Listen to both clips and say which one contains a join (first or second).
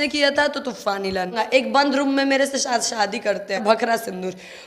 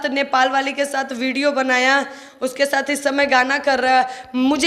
first